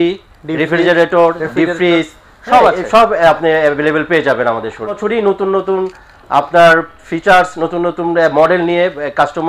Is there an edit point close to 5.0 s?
yes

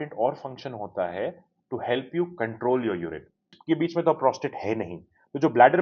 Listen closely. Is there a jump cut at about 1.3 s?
no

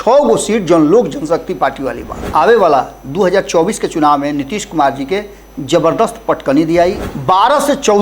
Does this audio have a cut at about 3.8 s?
no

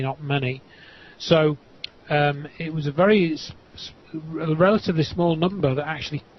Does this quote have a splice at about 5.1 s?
yes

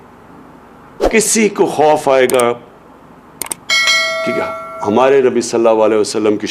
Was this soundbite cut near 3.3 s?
yes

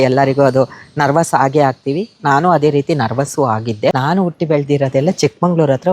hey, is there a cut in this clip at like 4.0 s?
yes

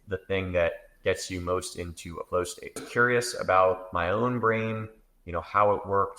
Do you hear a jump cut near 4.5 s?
no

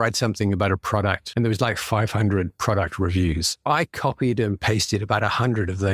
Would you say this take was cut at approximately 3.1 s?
no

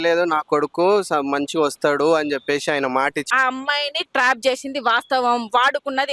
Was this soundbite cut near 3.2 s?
yes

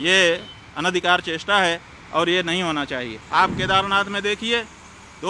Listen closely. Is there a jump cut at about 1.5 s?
no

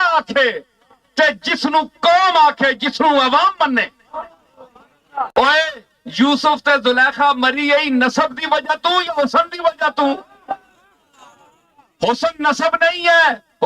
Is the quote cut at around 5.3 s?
yes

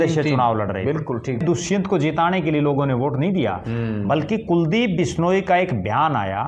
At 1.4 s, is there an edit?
yes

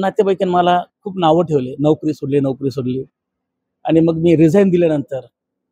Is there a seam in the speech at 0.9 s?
no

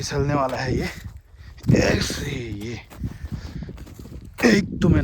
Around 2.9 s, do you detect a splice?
no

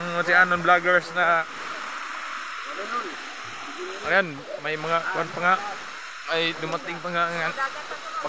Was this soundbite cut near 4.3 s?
no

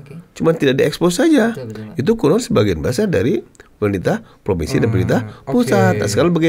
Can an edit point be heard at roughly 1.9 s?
no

